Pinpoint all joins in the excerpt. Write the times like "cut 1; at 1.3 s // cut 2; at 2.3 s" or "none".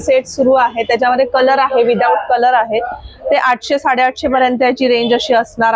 none

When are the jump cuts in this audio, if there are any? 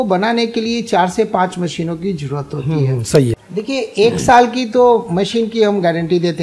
cut 1; at 3.4 s

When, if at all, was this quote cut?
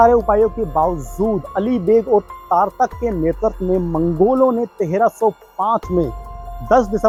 none

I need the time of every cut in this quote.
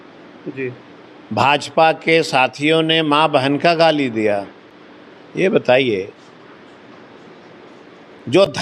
none

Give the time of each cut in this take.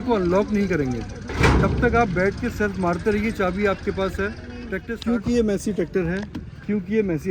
cut 1; at 4.8 s

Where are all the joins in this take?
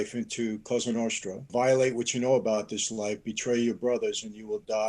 cut 1; at 1.5 s

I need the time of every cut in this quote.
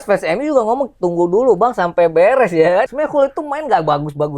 cut 1; at 2.9 s

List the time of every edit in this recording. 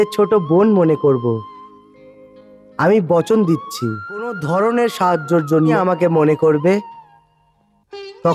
cut 1; at 4.4 s // cut 2; at 5.7 s

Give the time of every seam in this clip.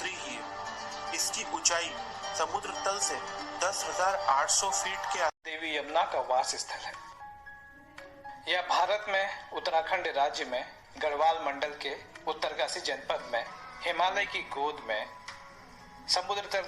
cut 1; at 5.5 s // cut 2; at 9.5 s

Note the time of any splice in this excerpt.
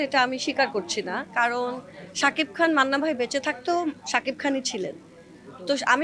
none

